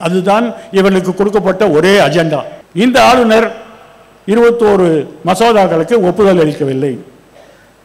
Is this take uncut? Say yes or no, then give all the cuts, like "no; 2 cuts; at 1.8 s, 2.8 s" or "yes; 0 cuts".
no; 1 cut; at 2.6 s